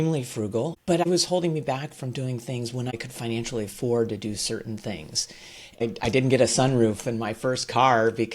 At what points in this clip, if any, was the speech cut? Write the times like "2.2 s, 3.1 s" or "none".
1.0 s, 2.9 s, 5.8 s